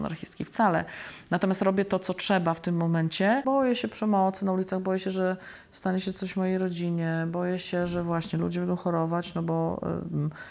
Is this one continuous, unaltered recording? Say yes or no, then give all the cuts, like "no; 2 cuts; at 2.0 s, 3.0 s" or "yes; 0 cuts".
no; 1 cut; at 3.4 s